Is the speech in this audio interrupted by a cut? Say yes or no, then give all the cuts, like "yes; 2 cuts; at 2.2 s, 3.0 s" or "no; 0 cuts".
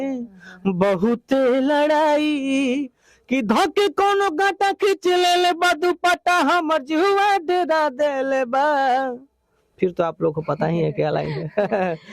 no; 0 cuts